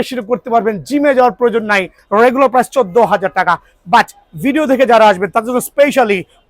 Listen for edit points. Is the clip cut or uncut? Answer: cut